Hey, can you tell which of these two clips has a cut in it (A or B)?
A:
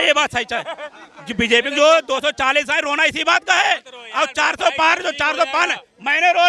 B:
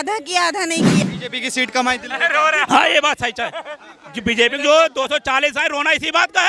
B